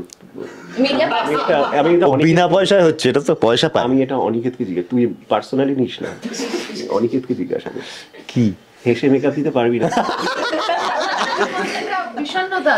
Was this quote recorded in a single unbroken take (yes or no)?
yes